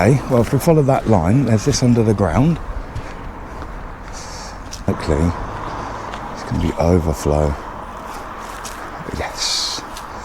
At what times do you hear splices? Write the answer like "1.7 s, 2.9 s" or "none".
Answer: 4.9 s